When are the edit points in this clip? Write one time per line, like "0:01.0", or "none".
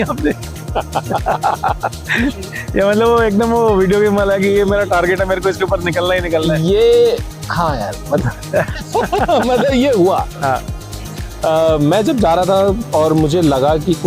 none